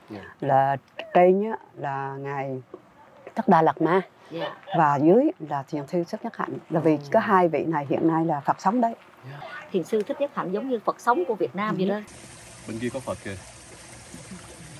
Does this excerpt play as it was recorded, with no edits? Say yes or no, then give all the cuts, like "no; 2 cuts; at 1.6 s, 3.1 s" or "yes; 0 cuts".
no; 2 cuts; at 9.4 s, 12.0 s